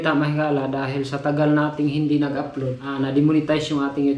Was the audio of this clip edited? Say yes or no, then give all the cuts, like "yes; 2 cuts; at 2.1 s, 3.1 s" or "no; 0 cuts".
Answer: yes; 1 cut; at 2.8 s